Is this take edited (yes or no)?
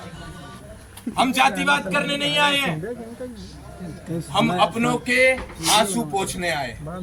no